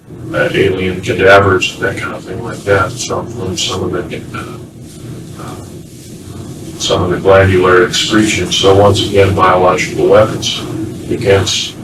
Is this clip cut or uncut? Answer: uncut